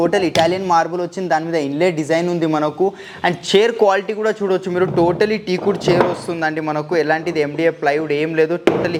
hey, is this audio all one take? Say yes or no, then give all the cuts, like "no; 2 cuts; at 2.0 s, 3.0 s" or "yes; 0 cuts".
yes; 0 cuts